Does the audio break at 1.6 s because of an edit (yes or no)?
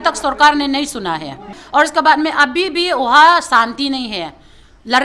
yes